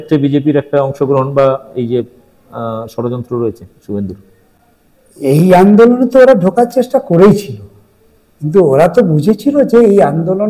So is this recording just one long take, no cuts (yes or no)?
yes